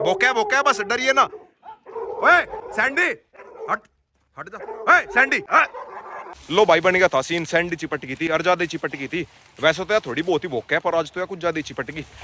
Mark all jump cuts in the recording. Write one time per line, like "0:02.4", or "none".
none